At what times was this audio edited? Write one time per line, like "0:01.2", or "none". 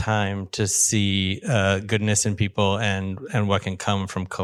none